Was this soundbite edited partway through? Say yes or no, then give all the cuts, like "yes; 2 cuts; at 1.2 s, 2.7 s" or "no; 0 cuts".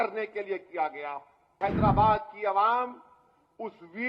yes; 1 cut; at 1.5 s